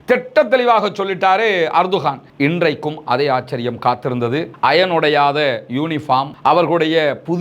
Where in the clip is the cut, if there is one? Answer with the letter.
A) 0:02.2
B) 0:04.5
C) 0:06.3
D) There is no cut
A